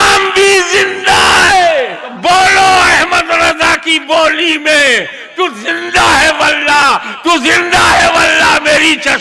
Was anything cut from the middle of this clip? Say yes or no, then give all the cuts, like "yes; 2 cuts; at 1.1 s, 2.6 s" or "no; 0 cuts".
yes; 1 cut; at 2.1 s